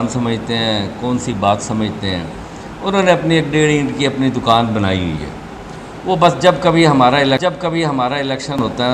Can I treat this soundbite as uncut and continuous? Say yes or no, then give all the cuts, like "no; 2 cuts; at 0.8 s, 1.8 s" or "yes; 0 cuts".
yes; 0 cuts